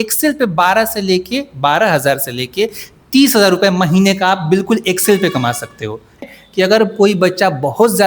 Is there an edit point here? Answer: yes; 1 cut; at 6.2 s

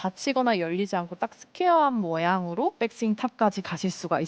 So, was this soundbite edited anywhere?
yes; 1 cut; at 2.8 s

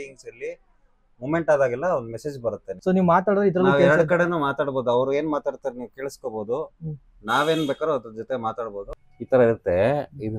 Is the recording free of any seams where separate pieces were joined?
no; 2 cuts; at 2.7 s, 8.8 s

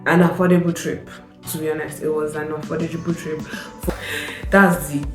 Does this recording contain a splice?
yes; 1 cut; at 3.9 s

